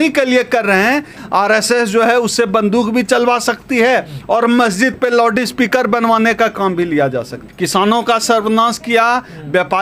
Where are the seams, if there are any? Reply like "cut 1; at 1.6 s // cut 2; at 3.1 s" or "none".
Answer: cut 1; at 1.2 s // cut 2; at 7.4 s

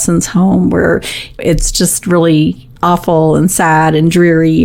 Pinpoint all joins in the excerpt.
cut 1; at 1.4 s // cut 2; at 2.7 s

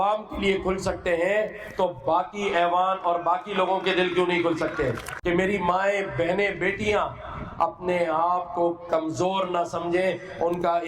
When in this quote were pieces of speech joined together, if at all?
cut 1; at 5.1 s

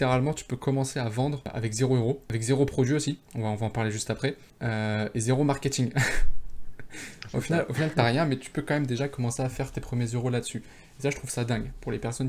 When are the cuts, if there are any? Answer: cut 1; at 1.5 s // cut 2; at 2.2 s // cut 3; at 3.3 s // cut 4; at 4.5 s

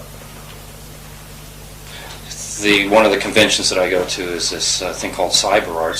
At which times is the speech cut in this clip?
cut 1; at 3.6 s

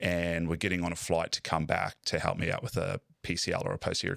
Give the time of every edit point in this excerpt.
none

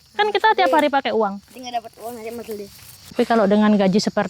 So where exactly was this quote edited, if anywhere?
cut 1; at 3.1 s

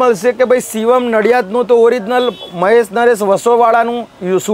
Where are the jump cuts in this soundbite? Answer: none

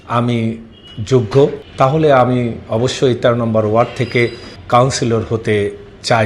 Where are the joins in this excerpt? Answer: cut 1; at 1.6 s // cut 2; at 4.5 s

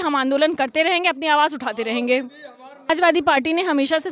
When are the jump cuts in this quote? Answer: cut 1; at 2.9 s

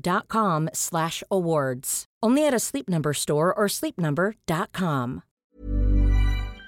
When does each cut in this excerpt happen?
cut 1; at 5.4 s

